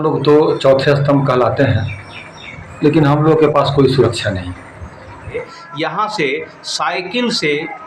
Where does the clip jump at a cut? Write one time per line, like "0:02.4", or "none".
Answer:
0:05.5